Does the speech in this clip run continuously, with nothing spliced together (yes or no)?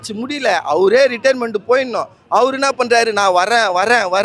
yes